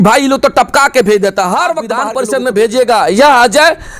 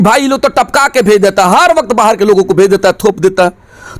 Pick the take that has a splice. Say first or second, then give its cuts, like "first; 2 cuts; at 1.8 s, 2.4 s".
first; 1 cut; at 1.9 s